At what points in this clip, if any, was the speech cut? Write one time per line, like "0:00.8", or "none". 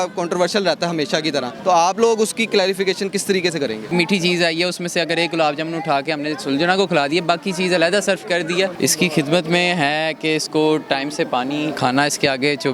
0:01.5
0:03.9
0:08.7
0:11.8